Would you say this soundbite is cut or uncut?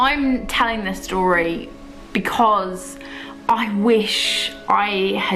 uncut